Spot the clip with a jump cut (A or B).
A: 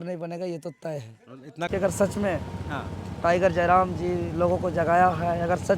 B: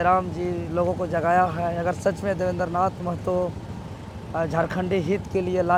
A